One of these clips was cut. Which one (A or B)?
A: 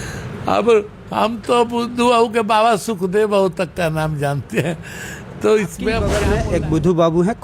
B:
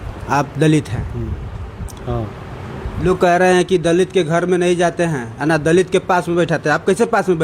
A